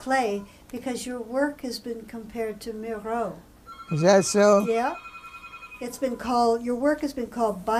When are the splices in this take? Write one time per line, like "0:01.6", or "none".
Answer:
none